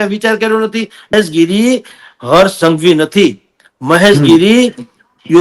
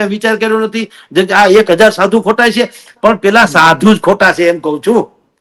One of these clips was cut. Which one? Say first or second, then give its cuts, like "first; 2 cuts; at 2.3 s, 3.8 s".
first; 1 cut; at 1.1 s